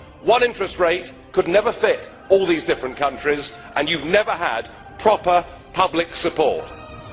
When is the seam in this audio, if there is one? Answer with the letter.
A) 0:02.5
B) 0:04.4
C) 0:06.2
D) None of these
B